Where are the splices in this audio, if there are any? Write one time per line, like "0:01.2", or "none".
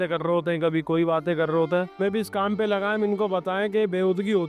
0:02.0